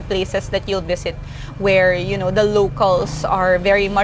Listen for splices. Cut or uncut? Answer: uncut